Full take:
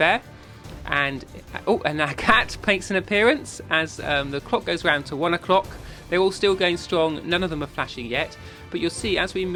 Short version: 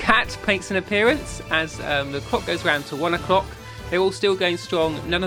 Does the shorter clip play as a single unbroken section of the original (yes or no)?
yes